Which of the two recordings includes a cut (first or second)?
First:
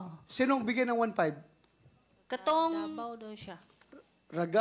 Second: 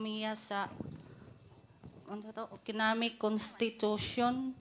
first